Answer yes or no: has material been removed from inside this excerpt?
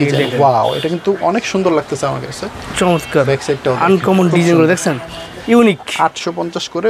no